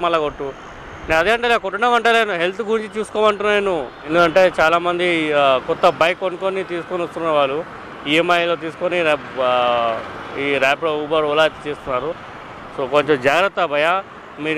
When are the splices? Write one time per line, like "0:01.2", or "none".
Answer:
0:04.0